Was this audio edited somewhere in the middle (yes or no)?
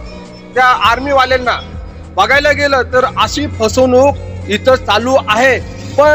no